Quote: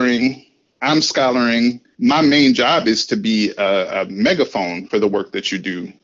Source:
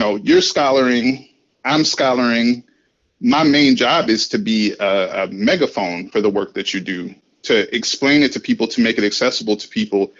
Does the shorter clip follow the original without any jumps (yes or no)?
no